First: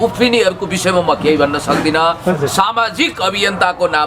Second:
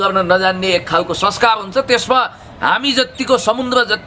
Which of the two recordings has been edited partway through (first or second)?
first